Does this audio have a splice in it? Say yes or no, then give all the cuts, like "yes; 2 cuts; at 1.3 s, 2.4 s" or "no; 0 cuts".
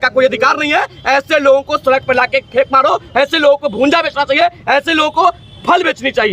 no; 0 cuts